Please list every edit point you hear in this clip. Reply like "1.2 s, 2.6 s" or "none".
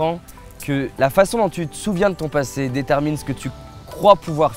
0.9 s